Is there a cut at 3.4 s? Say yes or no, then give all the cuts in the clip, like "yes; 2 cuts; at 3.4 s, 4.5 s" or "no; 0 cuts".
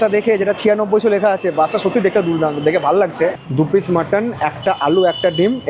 yes; 1 cut; at 3.4 s